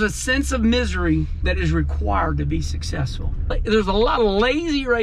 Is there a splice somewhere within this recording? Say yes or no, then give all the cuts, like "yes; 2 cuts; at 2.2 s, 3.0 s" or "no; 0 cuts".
yes; 2 cuts; at 1.4 s, 3.6 s